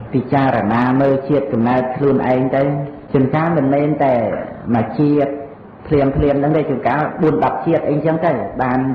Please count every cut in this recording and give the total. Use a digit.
1